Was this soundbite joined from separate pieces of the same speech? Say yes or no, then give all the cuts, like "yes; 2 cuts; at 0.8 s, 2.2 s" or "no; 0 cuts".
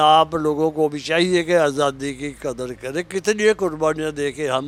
no; 0 cuts